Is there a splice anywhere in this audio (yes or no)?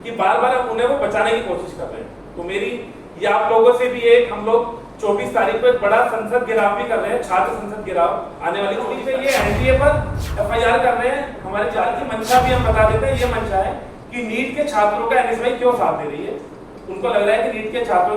yes